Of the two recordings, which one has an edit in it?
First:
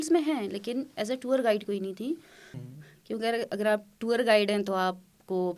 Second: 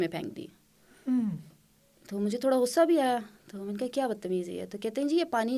first; 1 cut; at 2.6 s

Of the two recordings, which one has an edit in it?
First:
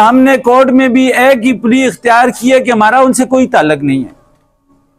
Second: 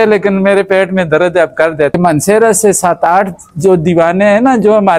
second; 1 cut; at 2.0 s

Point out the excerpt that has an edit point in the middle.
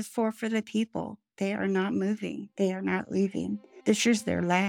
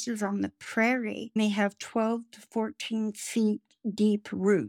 first; 2 cuts; at 2.4 s, 3.7 s

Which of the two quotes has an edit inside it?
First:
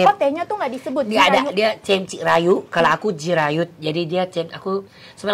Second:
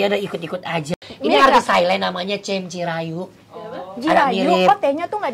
second; 1 cut; at 0.9 s

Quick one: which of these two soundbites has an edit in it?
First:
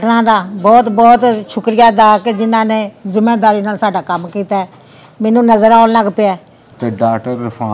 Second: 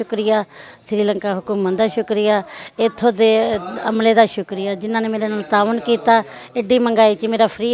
first; 1 cut; at 6.6 s

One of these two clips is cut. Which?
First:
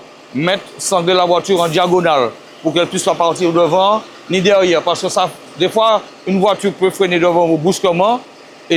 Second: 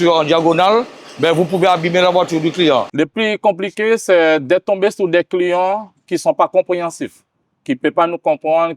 second; 1 cut; at 2.9 s

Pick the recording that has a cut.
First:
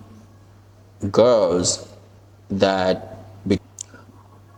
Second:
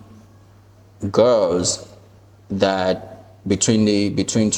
first; 1 cut; at 3.6 s

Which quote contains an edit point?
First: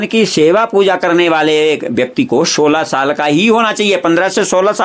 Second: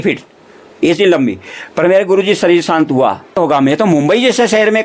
second; 1 cut; at 3.4 s

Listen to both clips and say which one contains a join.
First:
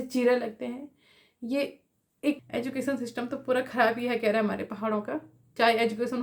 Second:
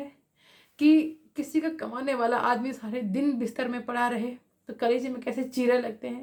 first; 1 cut; at 2.4 s

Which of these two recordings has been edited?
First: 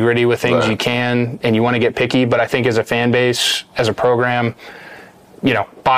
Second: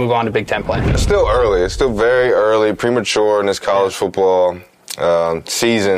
second; 1 cut; at 1.0 s

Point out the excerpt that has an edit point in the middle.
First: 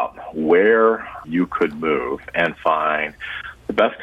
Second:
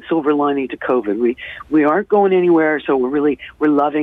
first; 1 cut; at 1.2 s

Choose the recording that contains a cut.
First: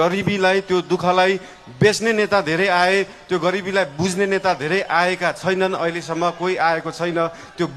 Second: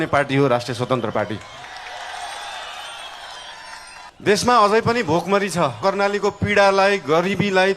second; 2 cuts; at 4.1 s, 5.8 s

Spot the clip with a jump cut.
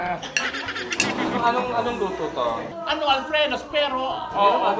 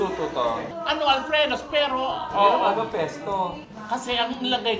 first; 1 cut; at 1.0 s

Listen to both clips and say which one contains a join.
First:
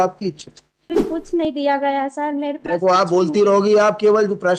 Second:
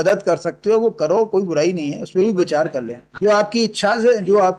first; 1 cut; at 1.1 s

